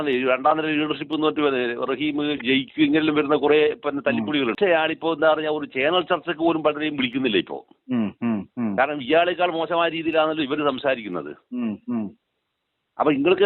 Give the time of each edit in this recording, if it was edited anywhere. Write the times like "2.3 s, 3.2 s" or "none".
4.5 s